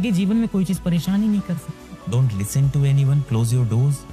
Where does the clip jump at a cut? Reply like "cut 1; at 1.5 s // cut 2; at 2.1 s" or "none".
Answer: cut 1; at 1.9 s